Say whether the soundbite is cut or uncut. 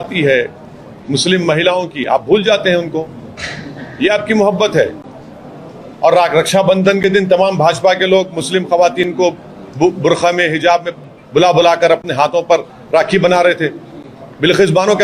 uncut